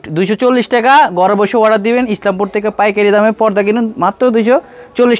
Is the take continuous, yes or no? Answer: yes